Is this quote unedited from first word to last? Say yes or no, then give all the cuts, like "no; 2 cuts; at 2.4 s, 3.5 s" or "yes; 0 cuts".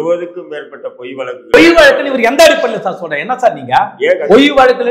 no; 1 cut; at 1.5 s